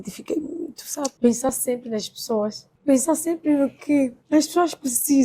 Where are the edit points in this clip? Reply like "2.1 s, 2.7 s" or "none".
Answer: 1.2 s, 2.7 s, 4.2 s